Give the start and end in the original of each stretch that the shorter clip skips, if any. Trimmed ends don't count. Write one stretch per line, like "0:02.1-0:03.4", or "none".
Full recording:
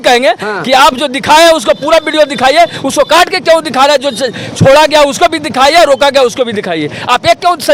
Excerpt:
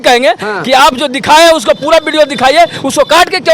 none